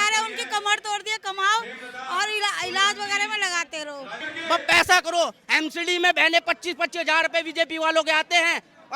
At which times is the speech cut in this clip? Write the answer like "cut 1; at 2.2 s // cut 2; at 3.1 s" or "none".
cut 1; at 4.3 s